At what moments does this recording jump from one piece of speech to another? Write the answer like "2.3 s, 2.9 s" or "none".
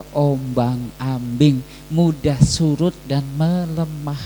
none